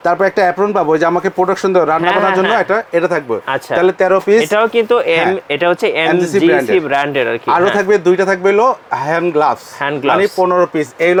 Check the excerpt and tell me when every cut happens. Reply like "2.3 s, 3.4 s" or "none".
none